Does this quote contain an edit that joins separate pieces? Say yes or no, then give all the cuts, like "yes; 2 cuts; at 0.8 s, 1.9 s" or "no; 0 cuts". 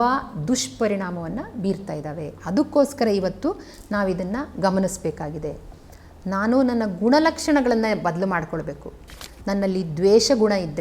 no; 0 cuts